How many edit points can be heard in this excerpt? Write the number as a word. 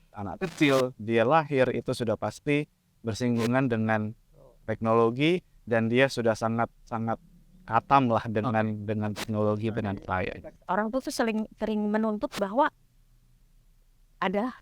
one